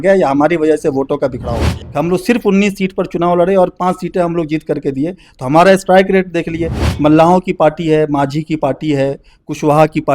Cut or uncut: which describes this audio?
cut